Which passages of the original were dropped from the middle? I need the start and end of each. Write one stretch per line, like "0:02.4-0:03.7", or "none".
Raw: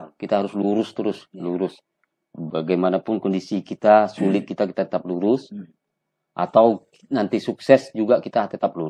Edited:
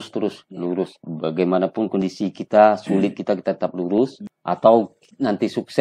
0:01.9-0:02.3
0:05.6-0:06.2